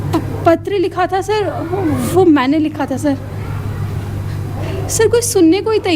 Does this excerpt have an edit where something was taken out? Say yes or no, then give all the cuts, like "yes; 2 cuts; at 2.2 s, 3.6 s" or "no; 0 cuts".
no; 0 cuts